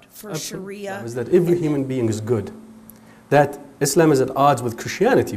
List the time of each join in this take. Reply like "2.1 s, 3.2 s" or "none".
1.1 s

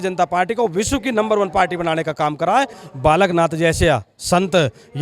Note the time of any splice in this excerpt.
2.8 s

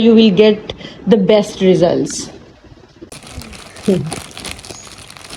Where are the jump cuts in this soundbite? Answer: 2.9 s

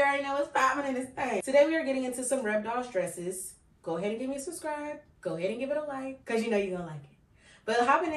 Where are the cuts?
1.4 s, 5.1 s, 6.2 s

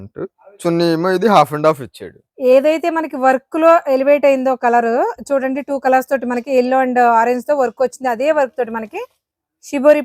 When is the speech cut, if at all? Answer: none

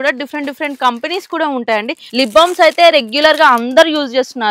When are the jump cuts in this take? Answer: 2.0 s

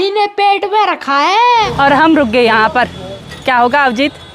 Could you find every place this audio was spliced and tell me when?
1.7 s

